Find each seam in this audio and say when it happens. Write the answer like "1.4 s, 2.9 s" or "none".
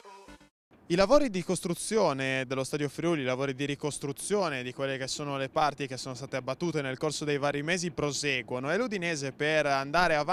none